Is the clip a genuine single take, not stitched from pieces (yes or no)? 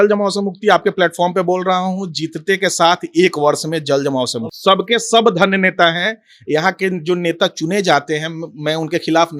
no